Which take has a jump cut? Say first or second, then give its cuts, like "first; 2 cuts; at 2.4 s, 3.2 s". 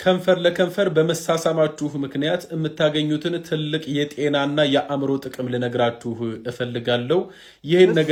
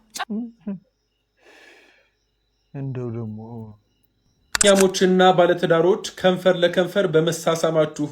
second; 1 cut; at 4.6 s